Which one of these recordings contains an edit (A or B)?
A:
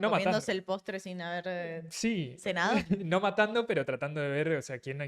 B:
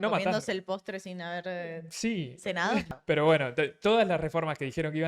B